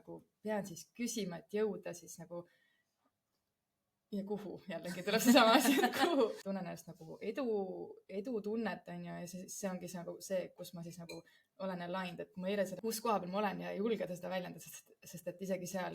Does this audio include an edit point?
yes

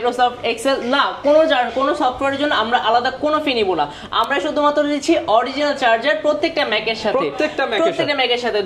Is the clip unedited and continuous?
yes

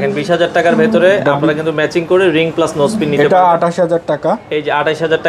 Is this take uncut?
yes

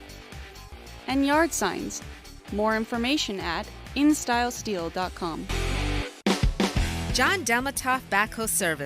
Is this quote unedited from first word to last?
no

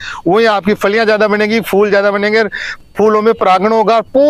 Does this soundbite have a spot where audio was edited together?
no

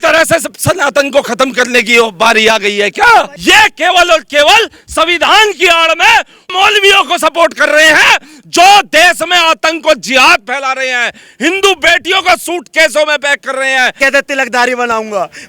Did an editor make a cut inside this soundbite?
yes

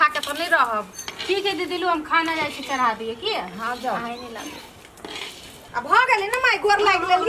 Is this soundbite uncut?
yes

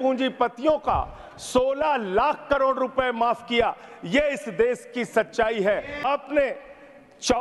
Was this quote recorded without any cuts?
no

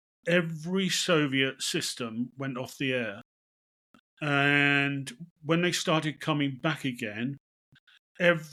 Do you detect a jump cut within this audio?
no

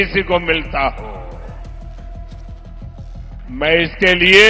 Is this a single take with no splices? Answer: no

